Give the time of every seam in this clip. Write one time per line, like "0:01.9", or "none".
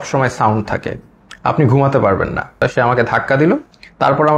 0:02.6

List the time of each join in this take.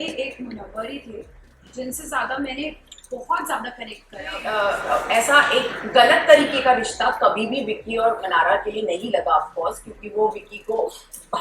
0:04.4

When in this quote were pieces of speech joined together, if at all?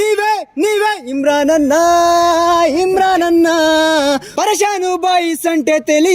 0:04.3

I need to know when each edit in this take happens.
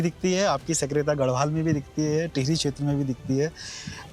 none

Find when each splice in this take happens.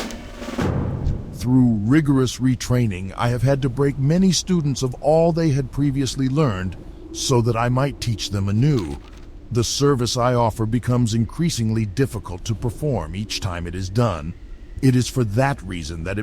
0:01.3

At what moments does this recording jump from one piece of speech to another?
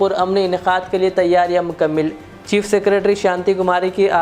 none

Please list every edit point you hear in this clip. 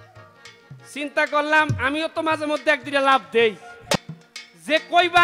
0:04.0

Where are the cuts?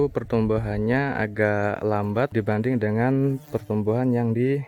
none

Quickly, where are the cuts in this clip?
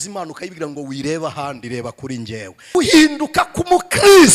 0:02.7

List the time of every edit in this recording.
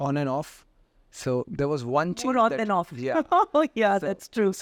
none

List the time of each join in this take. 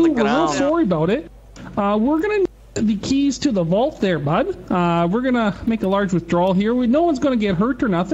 none

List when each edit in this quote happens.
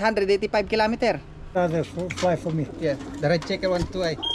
0:01.6

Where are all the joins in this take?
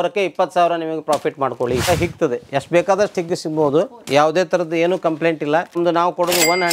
0:01.9
0:05.8

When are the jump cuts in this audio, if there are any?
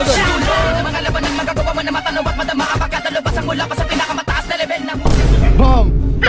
none

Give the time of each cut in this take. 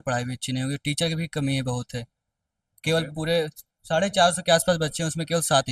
none

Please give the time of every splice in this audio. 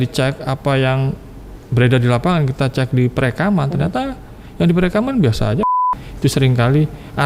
0:05.6

